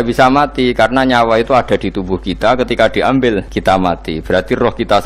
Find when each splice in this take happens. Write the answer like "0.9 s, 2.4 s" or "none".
3.5 s